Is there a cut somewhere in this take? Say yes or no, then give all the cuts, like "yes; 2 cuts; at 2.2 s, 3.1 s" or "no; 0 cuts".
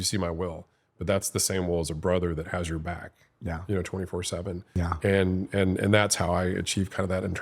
yes; 1 cut; at 4.7 s